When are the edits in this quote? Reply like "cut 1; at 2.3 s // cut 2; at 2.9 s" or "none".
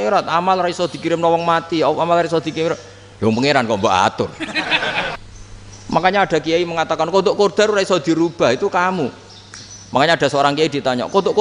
cut 1; at 5.2 s

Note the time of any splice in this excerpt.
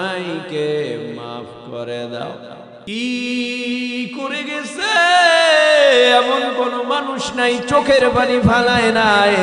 cut 1; at 2.7 s

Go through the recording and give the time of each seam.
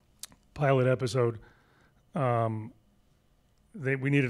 none

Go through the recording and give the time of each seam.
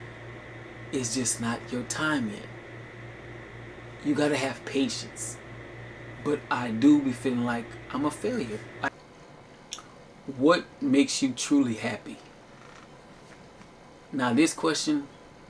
cut 1; at 8.9 s

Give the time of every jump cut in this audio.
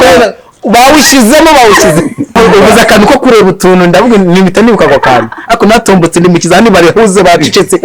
cut 1; at 2.4 s

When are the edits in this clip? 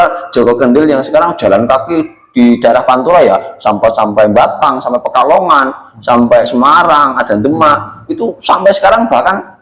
none

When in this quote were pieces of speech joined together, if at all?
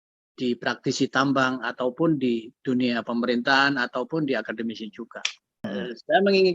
cut 1; at 5.6 s

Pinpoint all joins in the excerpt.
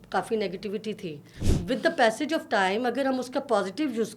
cut 1; at 1.5 s

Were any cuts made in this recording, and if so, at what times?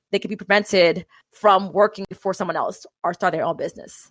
cut 1; at 1.2 s

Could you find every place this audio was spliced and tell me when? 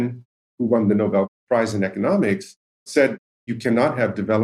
cut 1; at 1.3 s // cut 2; at 3.1 s

